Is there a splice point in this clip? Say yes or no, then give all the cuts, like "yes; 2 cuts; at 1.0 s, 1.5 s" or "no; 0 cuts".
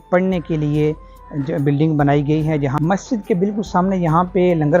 yes; 1 cut; at 2.7 s